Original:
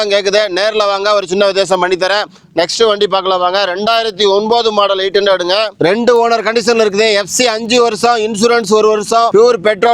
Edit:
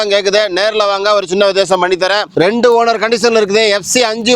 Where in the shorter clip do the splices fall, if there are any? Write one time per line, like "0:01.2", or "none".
0:02.3